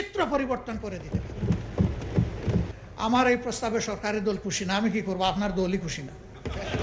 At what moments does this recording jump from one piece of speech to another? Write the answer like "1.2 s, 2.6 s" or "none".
2.7 s